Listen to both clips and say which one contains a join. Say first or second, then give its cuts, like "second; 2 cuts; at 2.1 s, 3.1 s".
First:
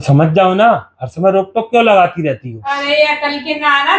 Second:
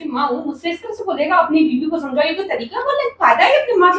first; 1 cut; at 2.5 s